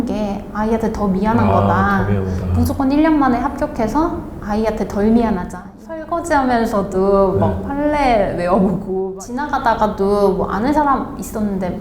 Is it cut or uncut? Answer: cut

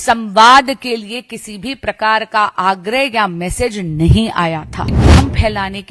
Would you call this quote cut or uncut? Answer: cut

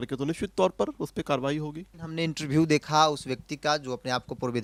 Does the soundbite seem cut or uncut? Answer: uncut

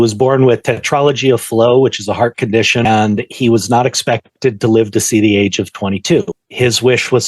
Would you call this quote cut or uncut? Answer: cut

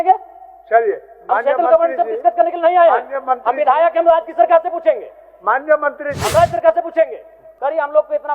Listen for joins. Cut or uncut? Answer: cut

